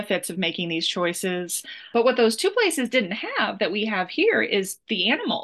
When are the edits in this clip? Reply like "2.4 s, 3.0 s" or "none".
1.9 s